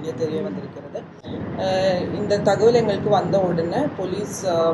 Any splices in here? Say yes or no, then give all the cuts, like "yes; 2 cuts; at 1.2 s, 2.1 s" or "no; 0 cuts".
no; 0 cuts